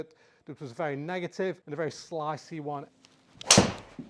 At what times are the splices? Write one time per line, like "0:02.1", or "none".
0:01.6
0:02.9